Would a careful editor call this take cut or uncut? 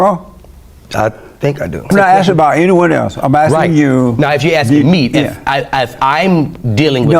cut